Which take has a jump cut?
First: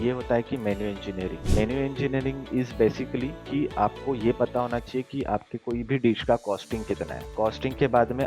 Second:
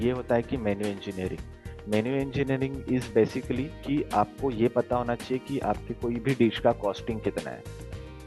first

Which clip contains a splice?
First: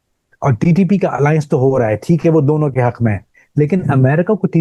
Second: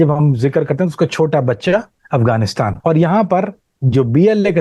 second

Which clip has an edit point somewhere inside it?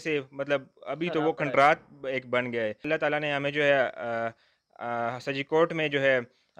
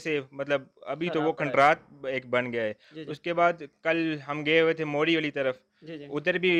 first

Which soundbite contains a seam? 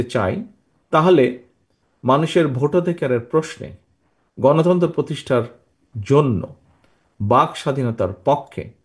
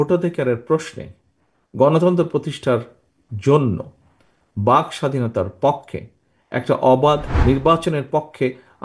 second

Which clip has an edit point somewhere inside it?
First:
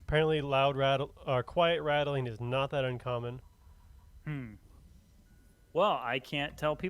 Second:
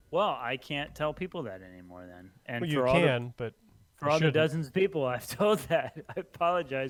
first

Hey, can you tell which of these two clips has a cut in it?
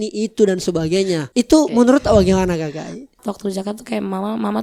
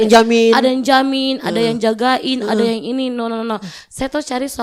first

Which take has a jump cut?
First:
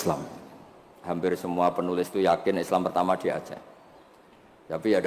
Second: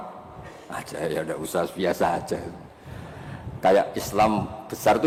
first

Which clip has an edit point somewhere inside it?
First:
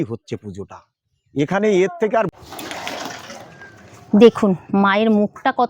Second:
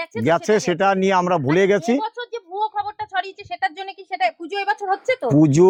first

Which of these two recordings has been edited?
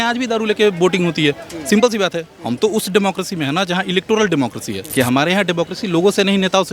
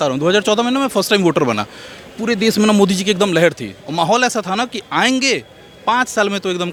first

